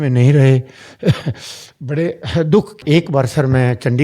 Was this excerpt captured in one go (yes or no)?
no